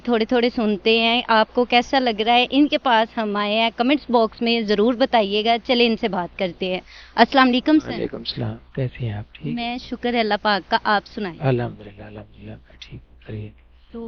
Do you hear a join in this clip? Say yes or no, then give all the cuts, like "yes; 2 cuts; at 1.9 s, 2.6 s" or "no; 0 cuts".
no; 0 cuts